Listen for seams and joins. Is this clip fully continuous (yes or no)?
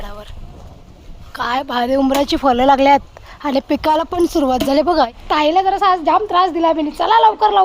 no